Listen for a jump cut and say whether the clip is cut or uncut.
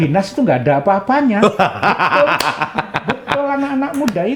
uncut